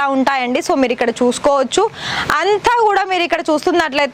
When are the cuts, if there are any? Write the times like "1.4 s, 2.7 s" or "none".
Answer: none